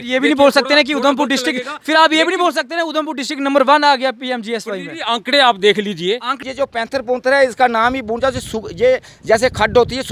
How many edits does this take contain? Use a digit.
1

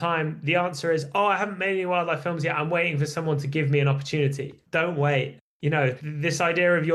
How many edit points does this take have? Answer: 1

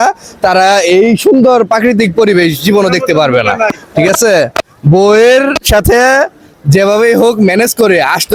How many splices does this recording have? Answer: 0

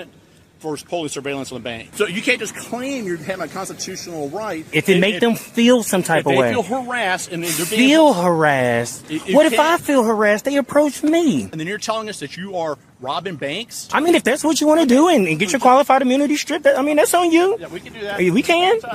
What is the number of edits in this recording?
4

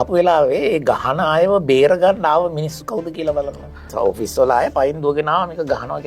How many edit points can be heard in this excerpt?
1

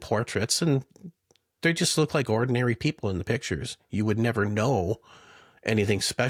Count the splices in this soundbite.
0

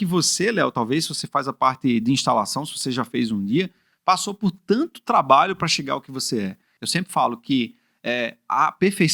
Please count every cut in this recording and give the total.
1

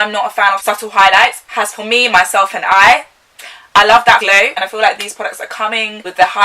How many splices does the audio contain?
1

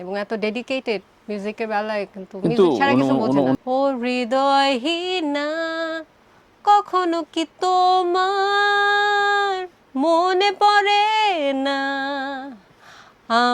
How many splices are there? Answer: 2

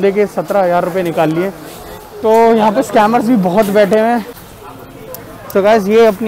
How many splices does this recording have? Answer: 1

